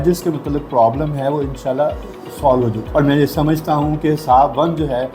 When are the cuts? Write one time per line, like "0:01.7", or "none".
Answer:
0:02.8